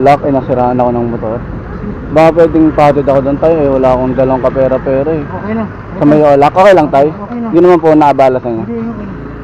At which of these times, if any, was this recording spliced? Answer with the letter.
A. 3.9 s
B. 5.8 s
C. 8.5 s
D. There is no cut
B